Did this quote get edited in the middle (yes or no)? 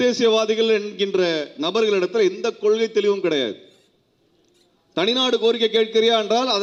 no